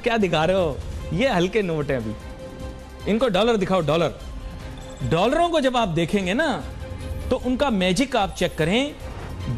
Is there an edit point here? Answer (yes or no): no